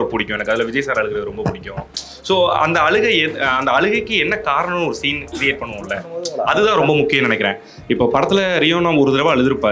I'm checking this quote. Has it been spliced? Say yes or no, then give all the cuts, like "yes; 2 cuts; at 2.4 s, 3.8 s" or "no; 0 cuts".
no; 0 cuts